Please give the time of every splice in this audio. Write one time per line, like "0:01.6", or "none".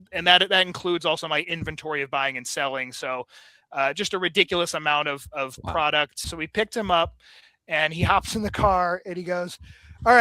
0:06.3